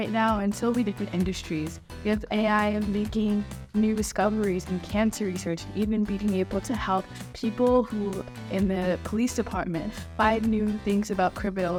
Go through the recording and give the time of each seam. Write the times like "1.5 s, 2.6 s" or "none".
none